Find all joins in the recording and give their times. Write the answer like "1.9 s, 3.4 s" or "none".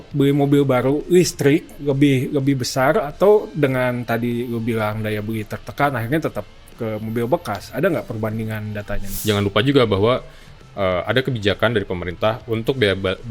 9.1 s